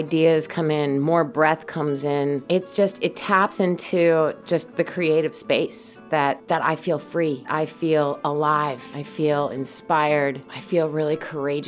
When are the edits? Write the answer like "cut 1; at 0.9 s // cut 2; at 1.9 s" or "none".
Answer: cut 1; at 2.4 s // cut 2; at 6.4 s // cut 3; at 7.5 s // cut 4; at 9.0 s // cut 5; at 10.5 s